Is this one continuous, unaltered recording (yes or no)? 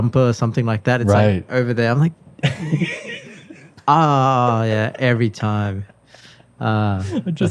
yes